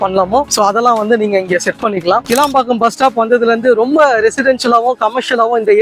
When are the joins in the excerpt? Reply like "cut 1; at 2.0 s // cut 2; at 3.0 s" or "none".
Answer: cut 1; at 2.2 s